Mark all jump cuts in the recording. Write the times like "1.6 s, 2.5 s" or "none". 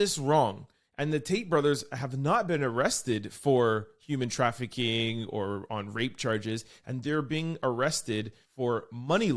8.4 s